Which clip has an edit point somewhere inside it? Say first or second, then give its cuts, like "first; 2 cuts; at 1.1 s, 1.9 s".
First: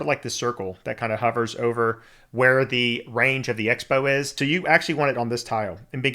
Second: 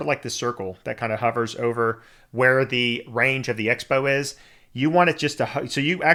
first; 1 cut; at 4.3 s